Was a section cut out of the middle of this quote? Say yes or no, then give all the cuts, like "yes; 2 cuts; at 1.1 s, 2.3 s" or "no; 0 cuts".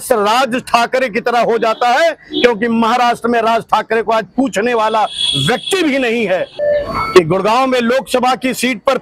yes; 1 cut; at 6.5 s